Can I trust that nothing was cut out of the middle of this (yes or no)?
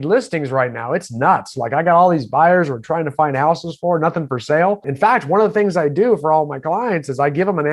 no